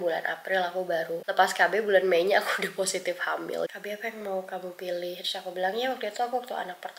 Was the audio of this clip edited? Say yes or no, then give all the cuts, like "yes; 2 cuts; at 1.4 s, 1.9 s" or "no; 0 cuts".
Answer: yes; 2 cuts; at 1.2 s, 3.7 s